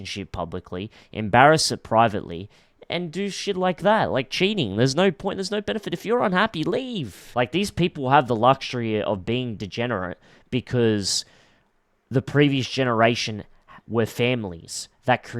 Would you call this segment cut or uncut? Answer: cut